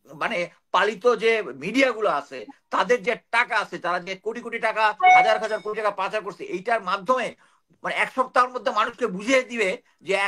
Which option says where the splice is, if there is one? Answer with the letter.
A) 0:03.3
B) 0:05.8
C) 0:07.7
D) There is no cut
D